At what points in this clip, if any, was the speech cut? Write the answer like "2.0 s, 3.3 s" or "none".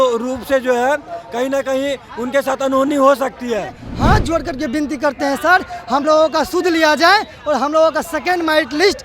3.8 s